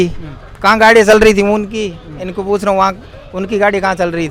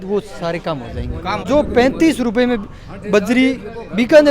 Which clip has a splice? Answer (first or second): second